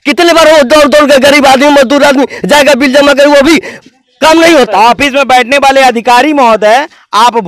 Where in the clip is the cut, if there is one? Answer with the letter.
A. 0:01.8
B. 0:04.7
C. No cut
B